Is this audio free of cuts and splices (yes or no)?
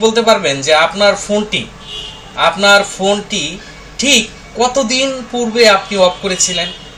yes